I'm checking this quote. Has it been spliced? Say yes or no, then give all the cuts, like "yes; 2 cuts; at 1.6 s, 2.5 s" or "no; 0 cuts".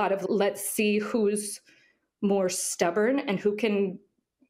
no; 0 cuts